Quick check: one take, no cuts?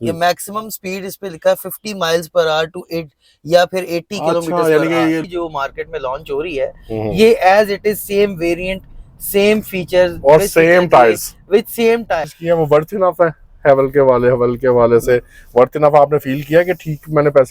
no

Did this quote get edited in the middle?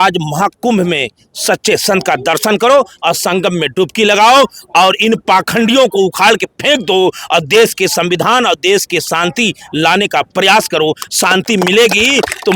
no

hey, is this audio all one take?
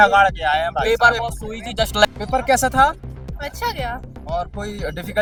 yes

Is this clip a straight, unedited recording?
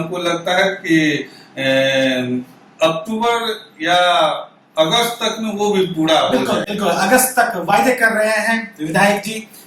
yes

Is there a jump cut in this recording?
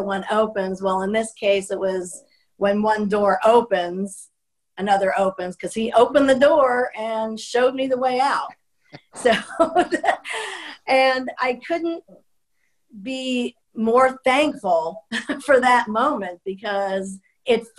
yes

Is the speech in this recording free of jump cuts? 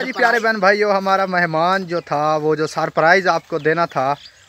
yes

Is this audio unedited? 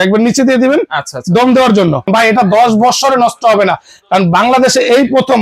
no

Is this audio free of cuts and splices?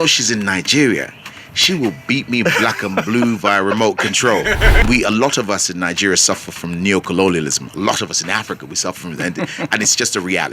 no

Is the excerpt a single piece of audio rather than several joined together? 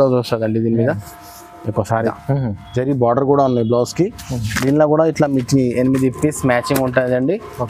no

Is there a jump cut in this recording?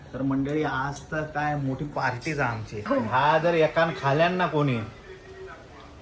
yes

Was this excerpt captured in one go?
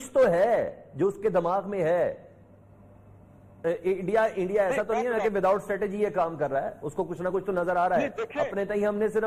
yes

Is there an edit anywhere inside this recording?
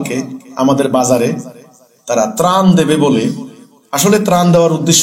no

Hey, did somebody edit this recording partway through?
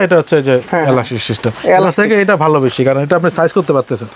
no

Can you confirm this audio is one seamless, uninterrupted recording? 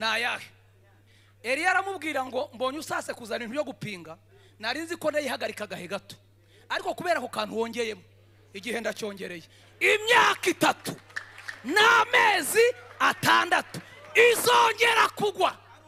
yes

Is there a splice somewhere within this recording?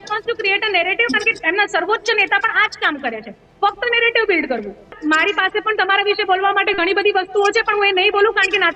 yes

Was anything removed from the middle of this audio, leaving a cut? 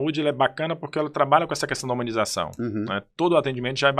no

